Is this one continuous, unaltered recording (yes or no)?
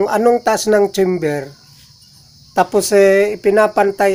yes